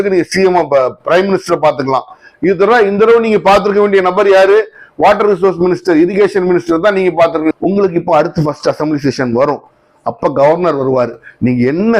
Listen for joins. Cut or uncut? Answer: cut